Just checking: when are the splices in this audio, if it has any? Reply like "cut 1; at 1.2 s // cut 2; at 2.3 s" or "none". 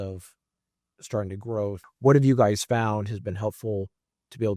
cut 1; at 1.9 s